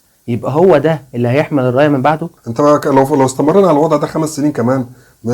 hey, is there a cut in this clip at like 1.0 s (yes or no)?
no